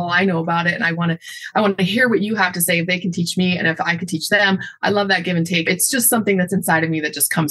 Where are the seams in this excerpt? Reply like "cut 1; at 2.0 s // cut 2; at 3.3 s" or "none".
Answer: cut 1; at 5.7 s